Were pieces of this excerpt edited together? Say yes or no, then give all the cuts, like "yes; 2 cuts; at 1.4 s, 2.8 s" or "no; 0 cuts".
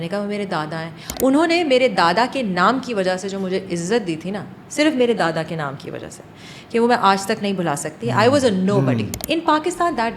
yes; 2 cuts; at 1.1 s, 9.1 s